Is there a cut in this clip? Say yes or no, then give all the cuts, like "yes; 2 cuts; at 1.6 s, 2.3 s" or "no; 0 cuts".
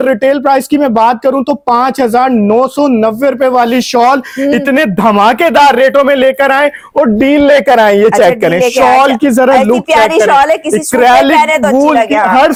no; 0 cuts